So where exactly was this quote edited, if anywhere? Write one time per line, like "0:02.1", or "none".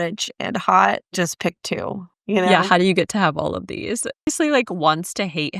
0:04.3